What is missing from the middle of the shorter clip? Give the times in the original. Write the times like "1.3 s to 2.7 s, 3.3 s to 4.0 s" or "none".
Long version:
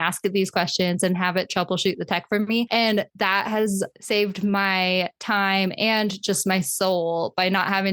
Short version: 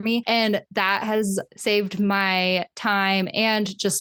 none